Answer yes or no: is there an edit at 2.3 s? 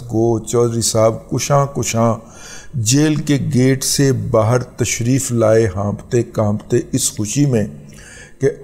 no